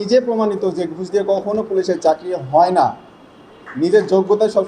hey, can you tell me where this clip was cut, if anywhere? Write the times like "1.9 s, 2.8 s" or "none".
none